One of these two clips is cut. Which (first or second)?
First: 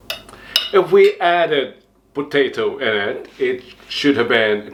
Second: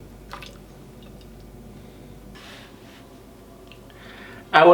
second